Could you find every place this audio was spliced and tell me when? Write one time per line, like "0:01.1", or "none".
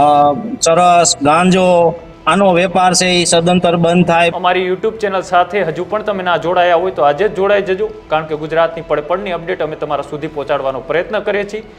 0:04.3